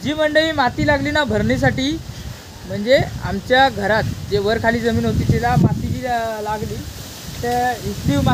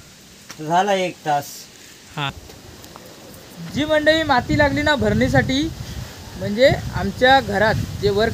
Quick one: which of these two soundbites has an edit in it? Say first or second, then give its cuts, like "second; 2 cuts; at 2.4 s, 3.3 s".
second; 1 cut; at 2.5 s